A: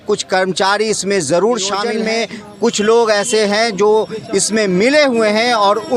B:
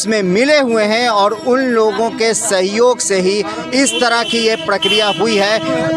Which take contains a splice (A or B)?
A